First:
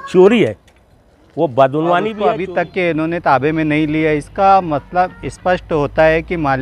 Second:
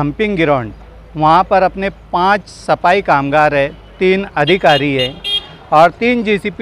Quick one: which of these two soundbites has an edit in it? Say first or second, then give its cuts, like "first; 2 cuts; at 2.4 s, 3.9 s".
first; 1 cut; at 2.2 s